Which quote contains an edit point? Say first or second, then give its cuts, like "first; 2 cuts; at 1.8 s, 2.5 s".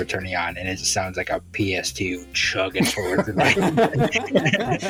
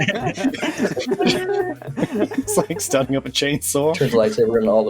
second; 2 cuts; at 1.8 s, 4.0 s